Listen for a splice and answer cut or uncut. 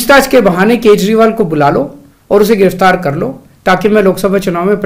uncut